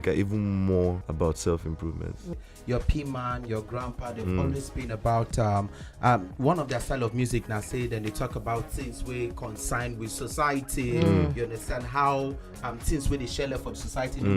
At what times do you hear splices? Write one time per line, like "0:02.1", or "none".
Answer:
0:01.0
0:02.3